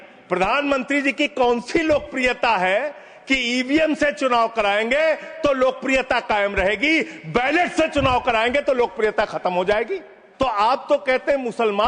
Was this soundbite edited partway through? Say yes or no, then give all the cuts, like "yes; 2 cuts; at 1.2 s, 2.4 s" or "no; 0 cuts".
yes; 1 cut; at 10.2 s